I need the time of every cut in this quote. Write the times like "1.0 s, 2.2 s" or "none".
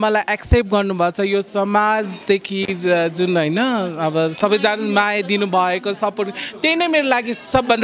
none